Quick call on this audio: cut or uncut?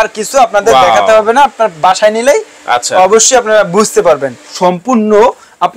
cut